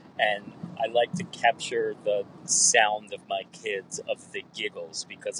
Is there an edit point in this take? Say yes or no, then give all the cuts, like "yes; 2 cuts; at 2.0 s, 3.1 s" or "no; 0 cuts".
no; 0 cuts